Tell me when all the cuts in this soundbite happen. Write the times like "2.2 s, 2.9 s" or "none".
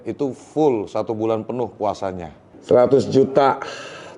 2.5 s